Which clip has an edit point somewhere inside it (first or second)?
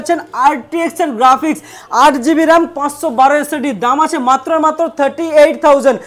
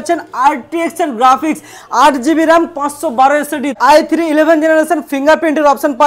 second